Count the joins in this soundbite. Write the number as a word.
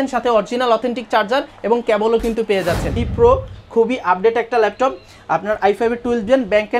one